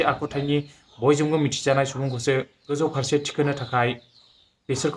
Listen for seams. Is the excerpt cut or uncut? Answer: cut